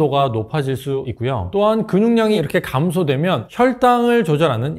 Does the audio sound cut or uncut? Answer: uncut